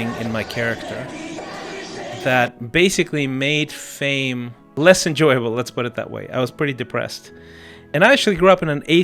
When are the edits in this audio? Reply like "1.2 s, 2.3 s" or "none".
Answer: 4.6 s, 7.8 s